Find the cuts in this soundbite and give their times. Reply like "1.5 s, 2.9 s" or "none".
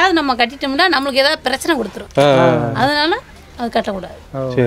none